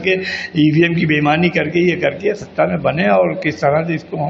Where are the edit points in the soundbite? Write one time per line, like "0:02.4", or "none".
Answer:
none